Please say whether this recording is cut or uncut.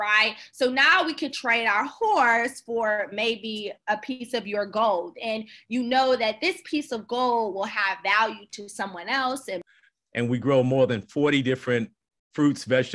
cut